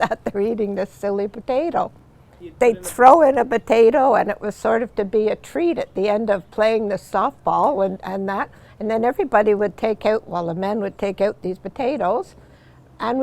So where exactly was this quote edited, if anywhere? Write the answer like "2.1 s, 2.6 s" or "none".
2.4 s